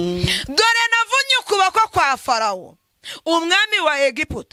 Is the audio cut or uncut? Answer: uncut